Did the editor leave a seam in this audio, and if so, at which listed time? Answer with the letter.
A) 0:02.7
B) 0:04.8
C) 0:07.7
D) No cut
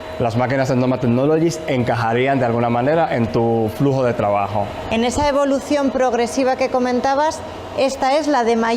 D